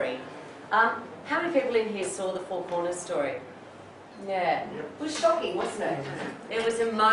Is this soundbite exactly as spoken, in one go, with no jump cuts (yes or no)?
yes